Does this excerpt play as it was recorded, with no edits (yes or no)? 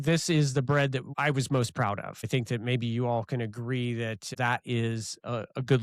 no